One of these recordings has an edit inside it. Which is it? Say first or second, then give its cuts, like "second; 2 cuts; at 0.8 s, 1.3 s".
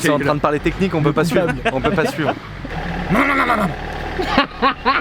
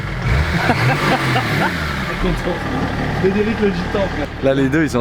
first; 1 cut; at 2.7 s